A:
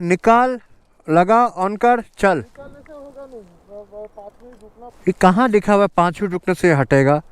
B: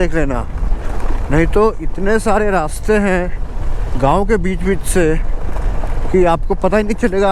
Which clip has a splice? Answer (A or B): A